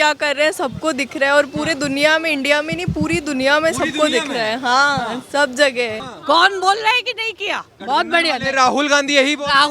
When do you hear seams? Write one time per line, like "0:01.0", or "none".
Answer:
0:06.1